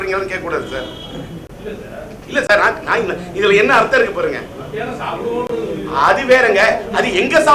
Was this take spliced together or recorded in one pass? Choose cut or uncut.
uncut